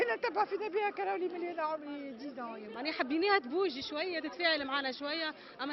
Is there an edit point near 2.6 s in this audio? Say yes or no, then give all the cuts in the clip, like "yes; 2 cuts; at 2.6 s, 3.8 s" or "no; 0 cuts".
yes; 1 cut; at 2.6 s